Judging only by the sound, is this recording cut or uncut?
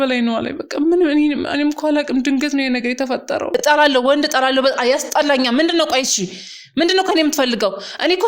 cut